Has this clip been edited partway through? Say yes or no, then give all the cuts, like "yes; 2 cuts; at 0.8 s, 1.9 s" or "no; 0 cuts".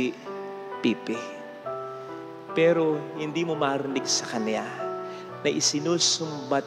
no; 0 cuts